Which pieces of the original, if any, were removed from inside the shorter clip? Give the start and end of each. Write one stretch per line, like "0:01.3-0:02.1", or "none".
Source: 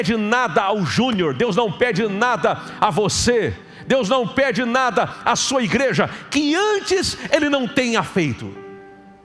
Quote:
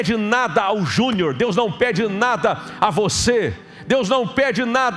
none